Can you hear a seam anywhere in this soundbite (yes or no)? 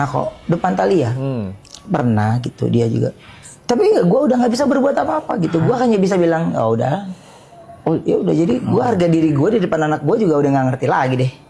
no